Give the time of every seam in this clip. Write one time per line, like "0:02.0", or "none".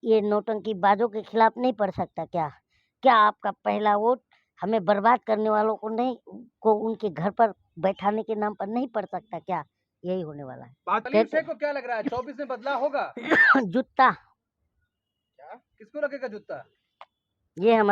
0:11.0